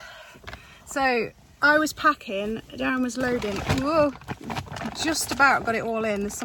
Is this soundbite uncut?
yes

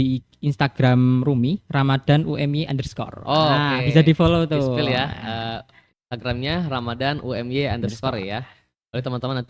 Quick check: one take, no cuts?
yes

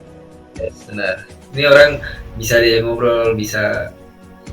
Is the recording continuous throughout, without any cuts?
no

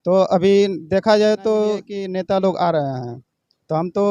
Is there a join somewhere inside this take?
yes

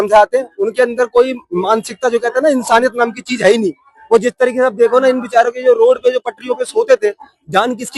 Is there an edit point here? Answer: no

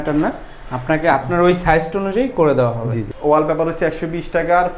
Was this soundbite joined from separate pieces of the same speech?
yes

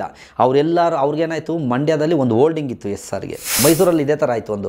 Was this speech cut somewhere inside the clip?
yes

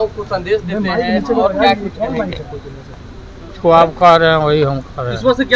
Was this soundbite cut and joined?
no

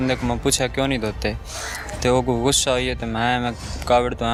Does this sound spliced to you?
no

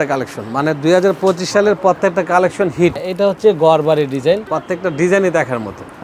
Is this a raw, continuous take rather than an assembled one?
no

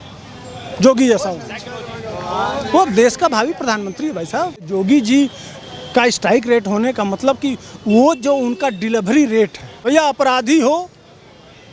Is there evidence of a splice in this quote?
yes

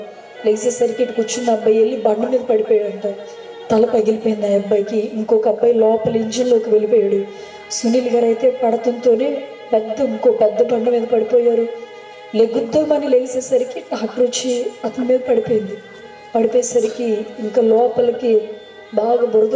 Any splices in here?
no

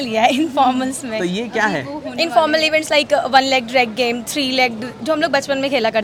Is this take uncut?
yes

